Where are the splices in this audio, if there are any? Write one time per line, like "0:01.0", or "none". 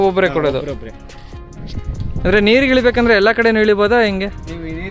none